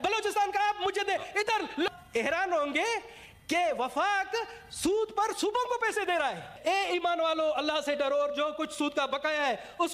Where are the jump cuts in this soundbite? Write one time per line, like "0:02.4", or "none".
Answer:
0:01.9
0:06.5